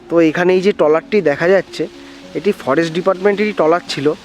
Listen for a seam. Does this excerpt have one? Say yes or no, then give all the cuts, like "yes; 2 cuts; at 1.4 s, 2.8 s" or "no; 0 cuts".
no; 0 cuts